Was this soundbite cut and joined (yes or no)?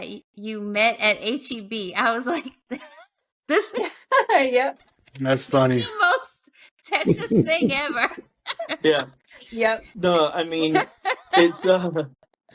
no